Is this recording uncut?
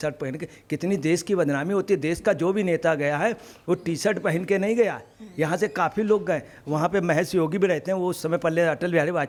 yes; 0 cuts

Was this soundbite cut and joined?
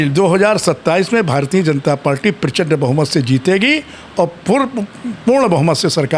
no; 0 cuts

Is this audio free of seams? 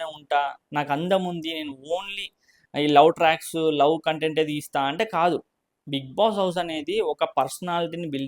yes; 0 cuts

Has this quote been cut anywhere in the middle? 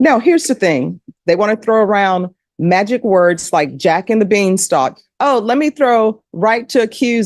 yes; 1 cut; at 1.0 s

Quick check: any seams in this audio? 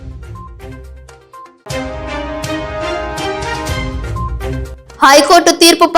yes; 2 cuts; at 3.1 s, 4.4 s

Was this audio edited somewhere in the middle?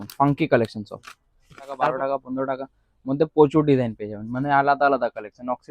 yes; 1 cut; at 1.6 s

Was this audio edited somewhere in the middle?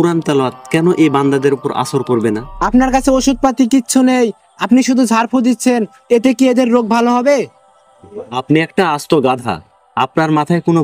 yes; 1 cut; at 2.5 s

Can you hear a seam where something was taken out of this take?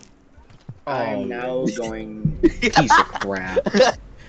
no; 0 cuts

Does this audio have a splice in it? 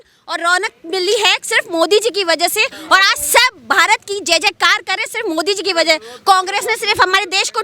no; 0 cuts

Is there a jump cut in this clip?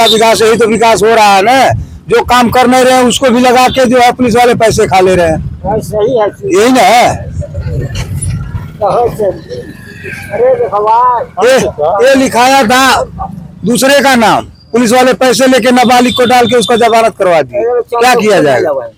no; 0 cuts

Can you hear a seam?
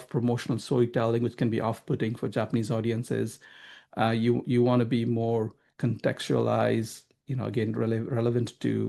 no; 0 cuts

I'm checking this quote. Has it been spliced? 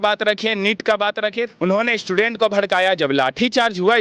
yes; 1 cut; at 1.4 s

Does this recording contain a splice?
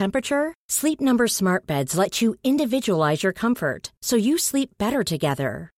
no; 0 cuts

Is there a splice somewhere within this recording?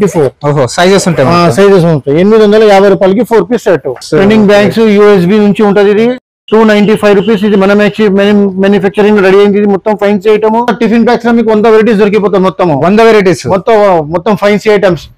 yes; 2 cuts; at 4.0 s, 10.7 s

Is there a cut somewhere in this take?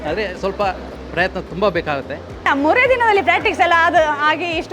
yes; 1 cut; at 2.3 s

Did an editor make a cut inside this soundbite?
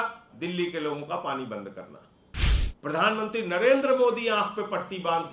yes; 1 cut; at 2.6 s

